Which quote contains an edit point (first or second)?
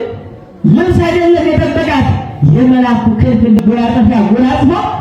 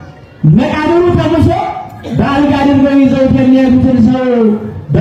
first